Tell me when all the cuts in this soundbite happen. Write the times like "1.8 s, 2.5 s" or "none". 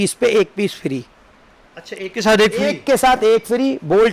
none